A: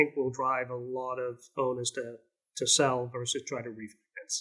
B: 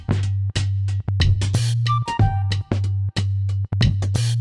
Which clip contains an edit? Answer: A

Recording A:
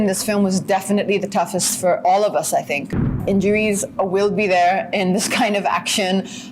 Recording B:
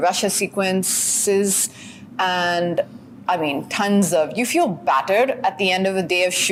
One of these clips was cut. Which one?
A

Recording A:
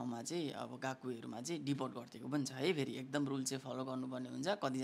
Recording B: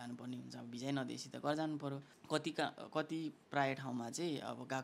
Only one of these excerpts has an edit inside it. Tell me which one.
B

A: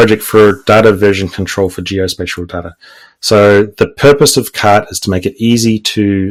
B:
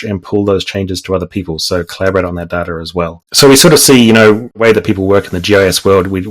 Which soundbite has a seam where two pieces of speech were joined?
B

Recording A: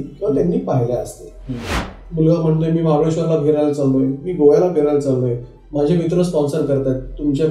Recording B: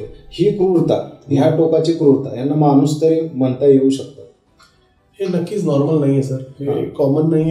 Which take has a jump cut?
A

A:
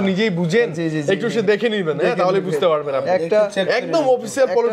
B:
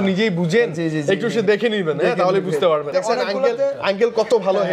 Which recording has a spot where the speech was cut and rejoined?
B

